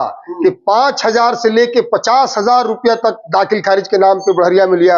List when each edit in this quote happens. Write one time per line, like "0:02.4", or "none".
none